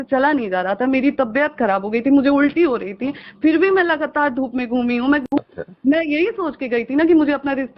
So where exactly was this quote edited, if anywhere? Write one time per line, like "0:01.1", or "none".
0:05.2